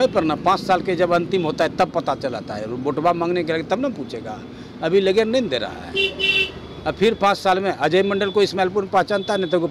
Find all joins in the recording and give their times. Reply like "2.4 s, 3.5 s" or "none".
none